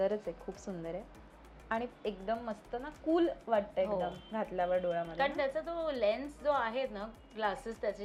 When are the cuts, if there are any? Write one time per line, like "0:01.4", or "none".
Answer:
none